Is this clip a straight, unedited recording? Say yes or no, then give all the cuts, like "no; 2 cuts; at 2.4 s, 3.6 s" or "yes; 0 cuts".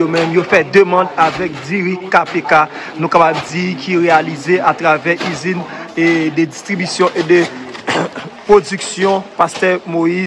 yes; 0 cuts